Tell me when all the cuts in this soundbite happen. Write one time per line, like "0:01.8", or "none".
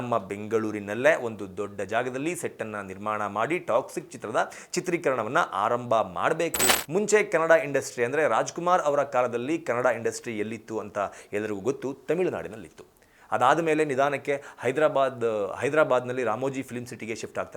0:06.7